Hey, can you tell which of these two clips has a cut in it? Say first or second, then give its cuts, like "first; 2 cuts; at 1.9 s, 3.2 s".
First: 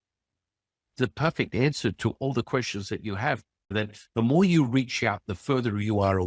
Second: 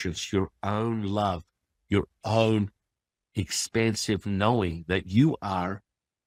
first; 1 cut; at 3.7 s